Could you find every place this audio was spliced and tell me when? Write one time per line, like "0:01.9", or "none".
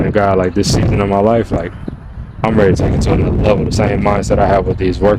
none